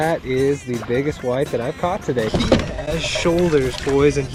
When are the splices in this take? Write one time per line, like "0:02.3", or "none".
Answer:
none